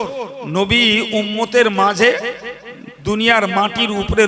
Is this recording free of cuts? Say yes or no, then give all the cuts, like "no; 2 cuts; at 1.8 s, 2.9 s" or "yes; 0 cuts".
yes; 0 cuts